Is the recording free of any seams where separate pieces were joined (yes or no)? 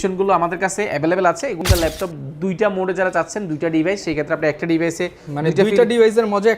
no